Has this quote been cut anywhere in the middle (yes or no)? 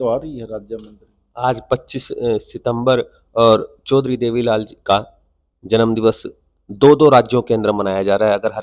no